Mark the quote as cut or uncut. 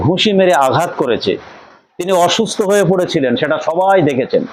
uncut